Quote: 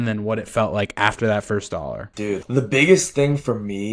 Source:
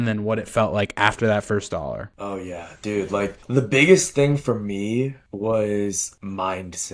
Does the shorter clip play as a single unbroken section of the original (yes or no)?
no